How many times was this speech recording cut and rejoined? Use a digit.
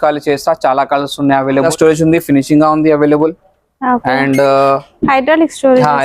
1